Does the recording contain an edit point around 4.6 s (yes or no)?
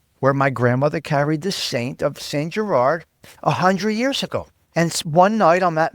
yes